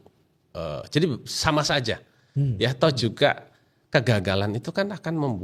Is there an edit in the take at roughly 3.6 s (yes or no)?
no